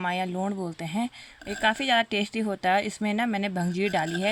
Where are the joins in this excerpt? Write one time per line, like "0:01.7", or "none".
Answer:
none